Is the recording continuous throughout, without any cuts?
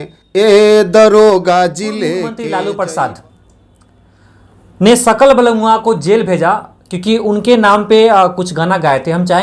no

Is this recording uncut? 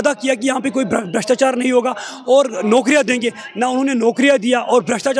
yes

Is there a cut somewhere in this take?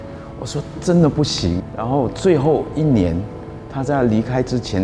yes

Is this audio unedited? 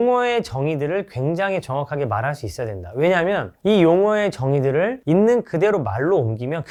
yes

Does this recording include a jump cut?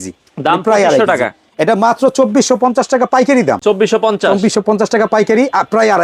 no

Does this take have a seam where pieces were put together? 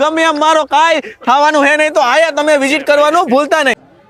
no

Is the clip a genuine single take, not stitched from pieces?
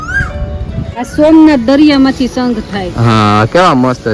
no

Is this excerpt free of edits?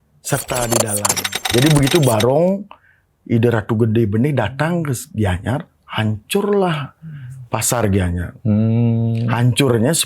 no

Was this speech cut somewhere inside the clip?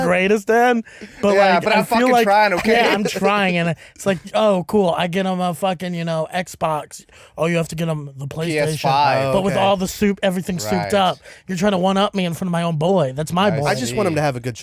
yes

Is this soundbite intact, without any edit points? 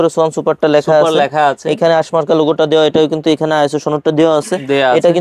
yes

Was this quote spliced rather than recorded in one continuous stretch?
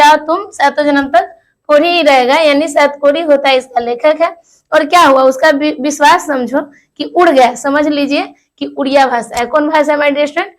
no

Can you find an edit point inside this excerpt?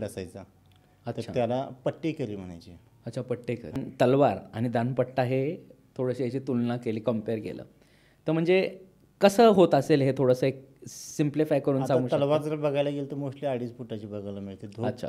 yes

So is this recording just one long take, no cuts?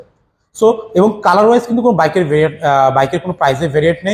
yes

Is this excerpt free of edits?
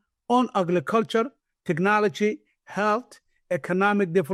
yes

